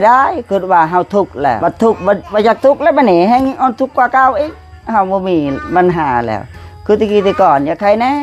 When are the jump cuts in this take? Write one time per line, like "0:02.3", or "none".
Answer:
0:01.6
0:02.2